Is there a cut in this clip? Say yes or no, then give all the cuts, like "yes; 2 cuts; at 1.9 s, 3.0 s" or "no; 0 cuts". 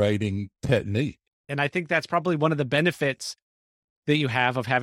yes; 1 cut; at 1.5 s